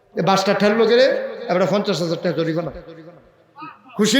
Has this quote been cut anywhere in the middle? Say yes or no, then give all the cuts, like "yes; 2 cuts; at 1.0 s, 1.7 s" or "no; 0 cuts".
no; 0 cuts